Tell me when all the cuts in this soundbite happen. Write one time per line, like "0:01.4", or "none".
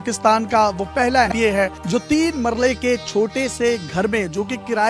0:01.3